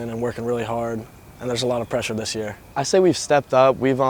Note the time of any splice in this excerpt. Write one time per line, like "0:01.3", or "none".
0:02.6